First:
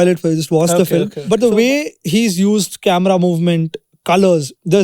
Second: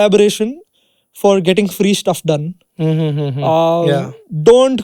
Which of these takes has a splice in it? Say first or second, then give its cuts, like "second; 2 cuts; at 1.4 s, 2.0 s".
first; 1 cut; at 1.2 s